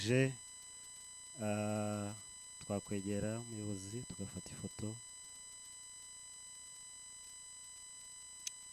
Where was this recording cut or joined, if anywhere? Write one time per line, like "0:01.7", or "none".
none

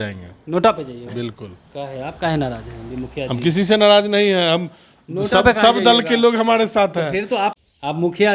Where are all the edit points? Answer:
none

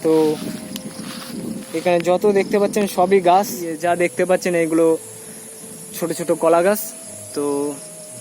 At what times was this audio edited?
0:03.7

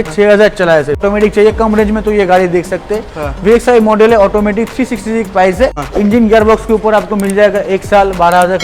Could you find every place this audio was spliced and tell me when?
0:01.0
0:05.8

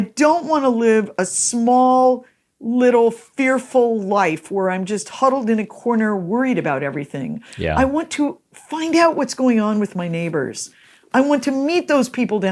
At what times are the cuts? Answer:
none

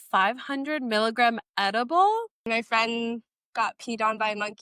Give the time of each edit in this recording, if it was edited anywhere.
0:02.5
0:03.4

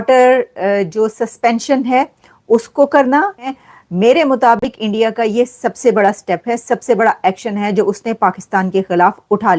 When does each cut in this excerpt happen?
0:03.6

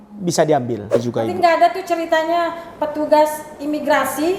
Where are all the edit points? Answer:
0:01.0

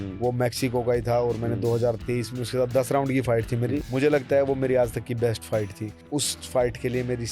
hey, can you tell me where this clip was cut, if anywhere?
0:03.9
0:06.0

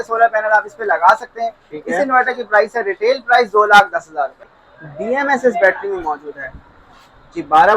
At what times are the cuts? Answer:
0:04.5

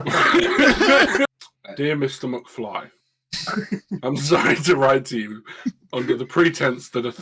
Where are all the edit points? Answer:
0:01.3

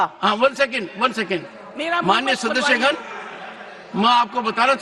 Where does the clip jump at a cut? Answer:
none

